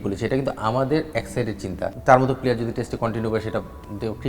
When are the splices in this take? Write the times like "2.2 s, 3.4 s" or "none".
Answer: 1.9 s